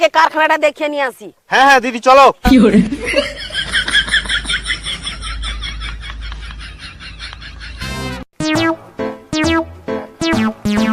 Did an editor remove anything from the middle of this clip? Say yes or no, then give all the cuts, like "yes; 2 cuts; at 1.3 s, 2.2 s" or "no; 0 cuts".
no; 0 cuts